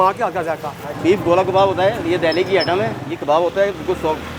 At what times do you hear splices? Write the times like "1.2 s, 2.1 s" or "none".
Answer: 1.0 s, 3.0 s